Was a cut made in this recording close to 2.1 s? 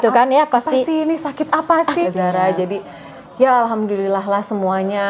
yes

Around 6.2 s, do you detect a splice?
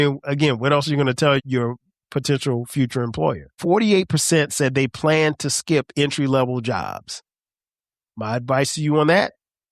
no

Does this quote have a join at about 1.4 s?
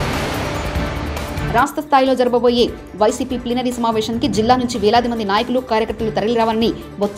yes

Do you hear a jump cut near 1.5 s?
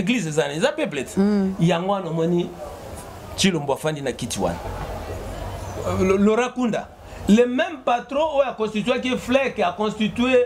no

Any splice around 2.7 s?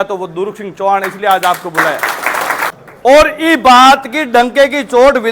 yes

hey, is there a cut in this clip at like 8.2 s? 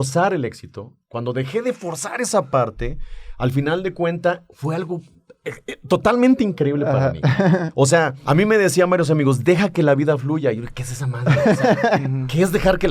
yes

